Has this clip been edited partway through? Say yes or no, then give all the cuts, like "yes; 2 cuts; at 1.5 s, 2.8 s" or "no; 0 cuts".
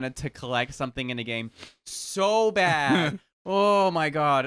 yes; 1 cut; at 3.3 s